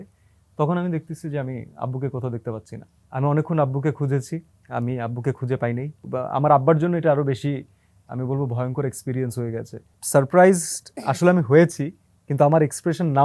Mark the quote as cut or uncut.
cut